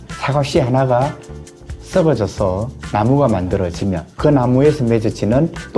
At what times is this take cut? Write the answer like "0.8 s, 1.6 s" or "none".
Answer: 2.8 s

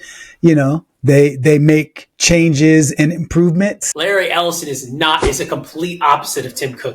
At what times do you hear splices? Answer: 3.9 s

